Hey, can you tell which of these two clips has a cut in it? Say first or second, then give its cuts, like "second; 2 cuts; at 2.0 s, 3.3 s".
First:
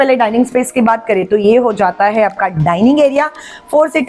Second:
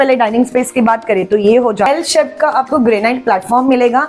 second; 1 cut; at 1.9 s